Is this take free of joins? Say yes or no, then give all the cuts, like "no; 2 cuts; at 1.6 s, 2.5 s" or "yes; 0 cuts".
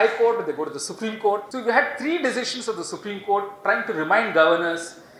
no; 1 cut; at 1.5 s